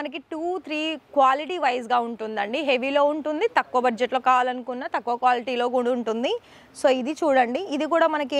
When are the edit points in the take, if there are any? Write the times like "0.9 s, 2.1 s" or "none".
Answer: none